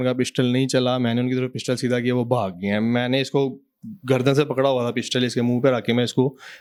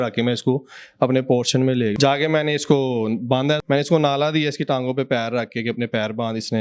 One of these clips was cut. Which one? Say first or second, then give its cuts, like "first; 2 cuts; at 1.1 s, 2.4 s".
second; 2 cuts; at 1.9 s, 3.6 s